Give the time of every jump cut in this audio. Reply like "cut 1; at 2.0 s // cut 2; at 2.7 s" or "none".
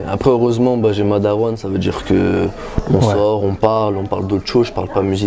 none